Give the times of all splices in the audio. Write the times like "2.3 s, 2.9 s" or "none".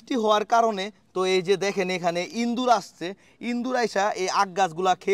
none